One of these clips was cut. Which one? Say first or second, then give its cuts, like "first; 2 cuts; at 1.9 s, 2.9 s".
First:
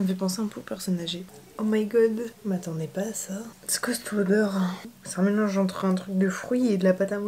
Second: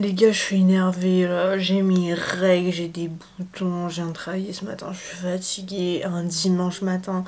first; 2 cuts; at 1.1 s, 4.8 s